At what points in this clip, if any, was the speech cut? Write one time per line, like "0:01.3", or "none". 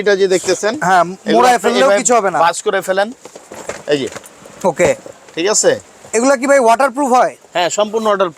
none